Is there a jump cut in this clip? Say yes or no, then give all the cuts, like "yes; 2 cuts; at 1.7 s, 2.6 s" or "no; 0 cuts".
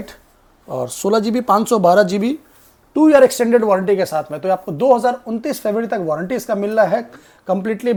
no; 0 cuts